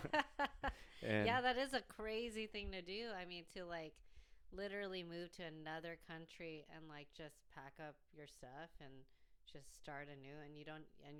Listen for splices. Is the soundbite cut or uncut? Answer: uncut